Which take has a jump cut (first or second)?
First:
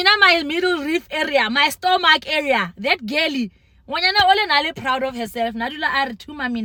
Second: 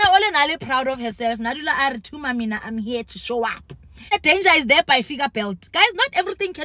second